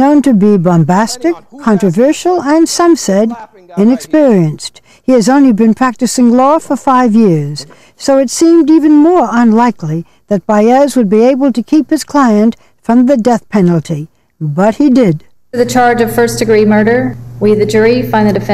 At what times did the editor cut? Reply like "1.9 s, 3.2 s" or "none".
15.6 s